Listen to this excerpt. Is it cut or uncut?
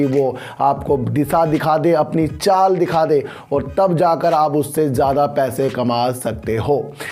uncut